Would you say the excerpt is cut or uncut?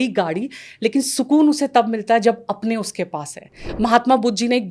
cut